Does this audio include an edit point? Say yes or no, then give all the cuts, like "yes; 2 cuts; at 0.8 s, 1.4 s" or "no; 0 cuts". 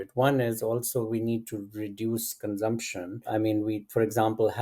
yes; 1 cut; at 3.3 s